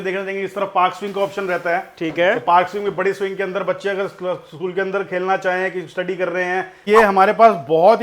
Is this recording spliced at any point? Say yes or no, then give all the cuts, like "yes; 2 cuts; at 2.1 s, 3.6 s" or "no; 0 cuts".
yes; 1 cut; at 6.8 s